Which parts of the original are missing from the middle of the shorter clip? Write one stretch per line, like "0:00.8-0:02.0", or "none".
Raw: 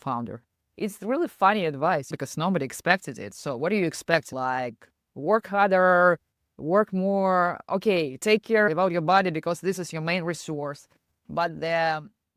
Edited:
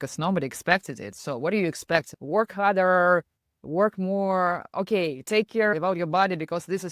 0:04.3-0:05.1